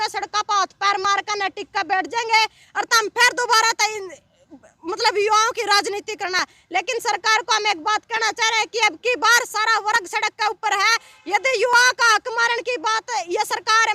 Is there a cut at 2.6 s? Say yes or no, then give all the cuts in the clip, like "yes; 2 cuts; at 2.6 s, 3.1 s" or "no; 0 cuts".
no; 0 cuts